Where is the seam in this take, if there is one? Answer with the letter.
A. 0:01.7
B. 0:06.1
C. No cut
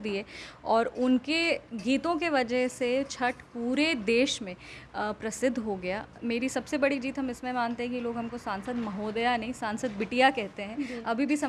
B